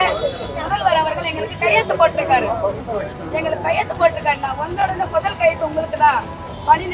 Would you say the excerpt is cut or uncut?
uncut